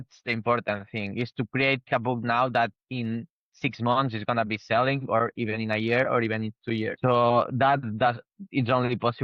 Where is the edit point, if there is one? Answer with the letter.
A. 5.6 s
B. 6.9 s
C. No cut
B